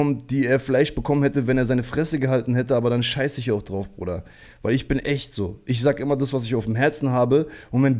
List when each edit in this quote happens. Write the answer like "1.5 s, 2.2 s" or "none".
none